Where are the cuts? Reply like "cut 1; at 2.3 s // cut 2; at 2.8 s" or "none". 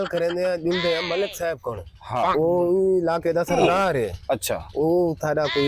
none